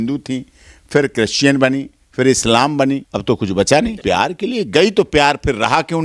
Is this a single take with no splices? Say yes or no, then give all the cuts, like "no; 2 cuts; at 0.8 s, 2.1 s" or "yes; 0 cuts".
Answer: no; 2 cuts; at 3.1 s, 4.0 s